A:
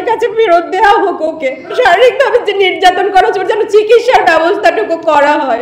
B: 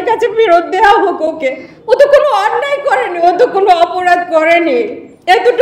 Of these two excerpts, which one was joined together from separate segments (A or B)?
A